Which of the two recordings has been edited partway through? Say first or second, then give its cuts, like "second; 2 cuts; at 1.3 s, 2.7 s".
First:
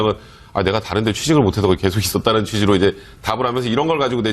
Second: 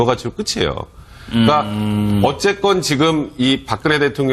first; 1 cut; at 1.6 s